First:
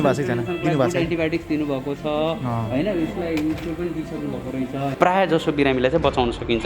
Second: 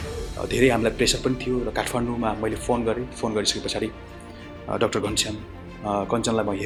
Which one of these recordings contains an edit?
first; 1 cut; at 4.9 s

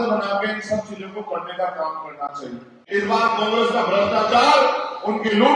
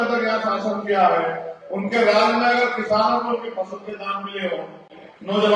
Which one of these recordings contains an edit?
first; 1 cut; at 2.8 s

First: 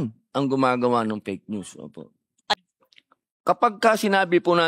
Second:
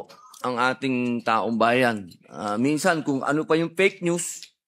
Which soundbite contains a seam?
first; 1 cut; at 2.5 s

